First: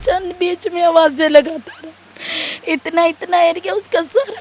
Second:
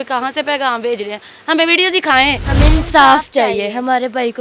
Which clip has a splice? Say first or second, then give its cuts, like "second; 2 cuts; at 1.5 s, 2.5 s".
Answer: second; 1 cut; at 2.4 s